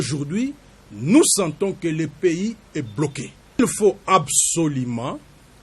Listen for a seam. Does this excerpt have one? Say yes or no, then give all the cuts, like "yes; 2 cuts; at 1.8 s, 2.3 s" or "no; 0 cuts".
yes; 1 cut; at 3.6 s